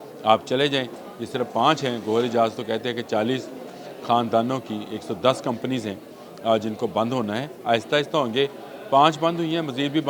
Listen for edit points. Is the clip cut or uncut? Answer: uncut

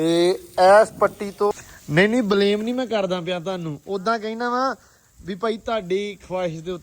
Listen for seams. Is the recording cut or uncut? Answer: cut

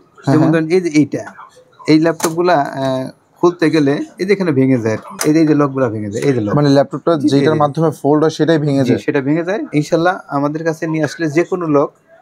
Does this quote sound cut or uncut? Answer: cut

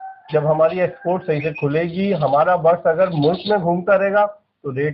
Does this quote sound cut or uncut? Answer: uncut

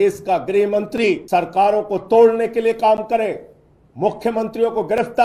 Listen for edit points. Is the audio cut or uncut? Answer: cut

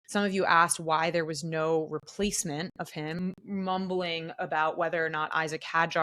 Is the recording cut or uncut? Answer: cut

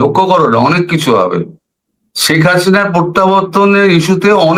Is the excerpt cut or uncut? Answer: uncut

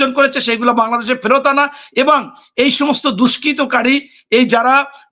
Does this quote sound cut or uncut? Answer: uncut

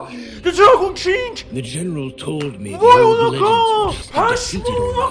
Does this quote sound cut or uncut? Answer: cut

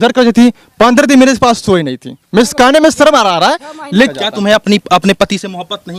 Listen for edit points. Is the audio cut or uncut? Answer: cut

